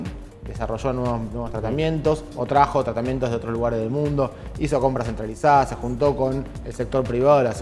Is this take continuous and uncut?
yes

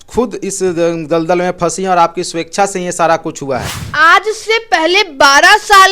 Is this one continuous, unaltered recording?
no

